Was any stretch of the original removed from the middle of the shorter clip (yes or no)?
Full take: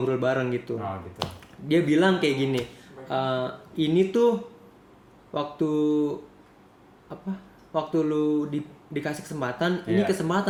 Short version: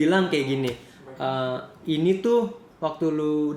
yes